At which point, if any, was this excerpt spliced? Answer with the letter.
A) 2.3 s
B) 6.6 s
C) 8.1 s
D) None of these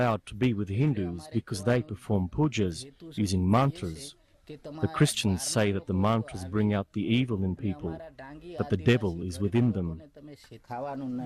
A